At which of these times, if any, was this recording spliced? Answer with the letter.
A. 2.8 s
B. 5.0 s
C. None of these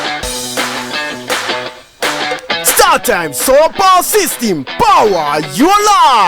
C